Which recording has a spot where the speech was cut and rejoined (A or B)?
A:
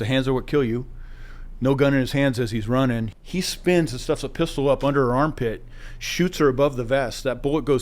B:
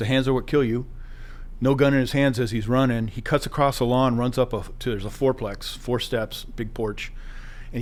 A